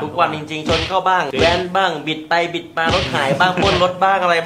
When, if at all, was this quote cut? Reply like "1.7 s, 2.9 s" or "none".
none